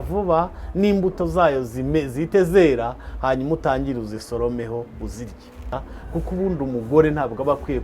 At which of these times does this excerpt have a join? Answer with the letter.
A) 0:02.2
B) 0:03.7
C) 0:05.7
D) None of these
C